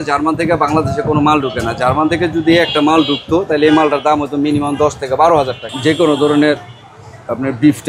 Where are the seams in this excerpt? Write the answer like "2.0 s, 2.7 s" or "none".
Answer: 5.6 s